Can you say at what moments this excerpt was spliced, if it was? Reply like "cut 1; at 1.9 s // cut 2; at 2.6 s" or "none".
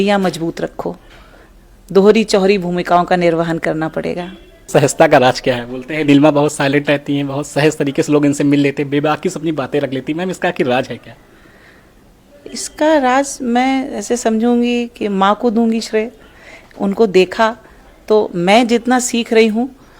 cut 1; at 4.6 s